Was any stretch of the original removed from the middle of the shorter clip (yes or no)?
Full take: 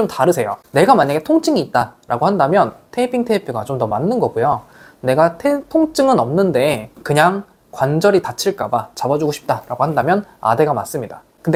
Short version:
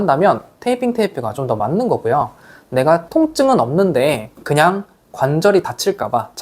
yes